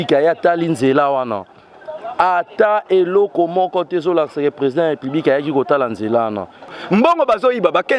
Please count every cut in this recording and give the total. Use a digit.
1